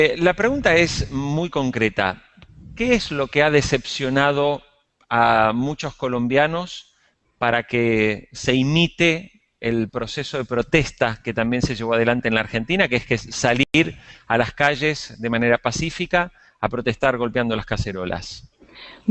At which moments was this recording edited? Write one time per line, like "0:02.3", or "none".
0:01.5